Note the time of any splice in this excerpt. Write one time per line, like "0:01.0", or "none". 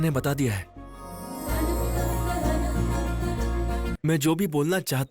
0:01.2
0:03.9